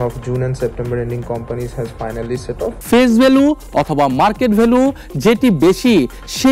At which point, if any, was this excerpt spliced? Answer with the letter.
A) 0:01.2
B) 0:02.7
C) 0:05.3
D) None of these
B